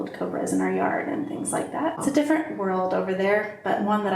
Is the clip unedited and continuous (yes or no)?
no